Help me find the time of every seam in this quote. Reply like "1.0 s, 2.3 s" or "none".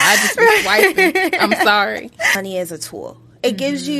2.3 s